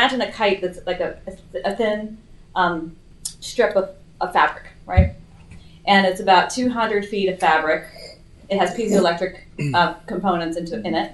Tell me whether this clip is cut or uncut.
uncut